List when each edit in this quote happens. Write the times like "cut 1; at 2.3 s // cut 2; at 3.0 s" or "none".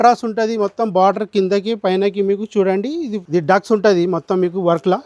cut 1; at 3.2 s